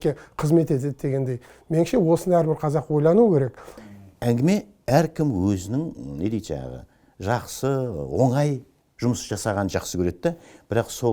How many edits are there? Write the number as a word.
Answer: one